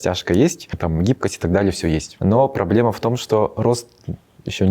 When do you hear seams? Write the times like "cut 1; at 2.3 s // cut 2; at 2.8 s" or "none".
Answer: cut 1; at 0.8 s // cut 2; at 2.1 s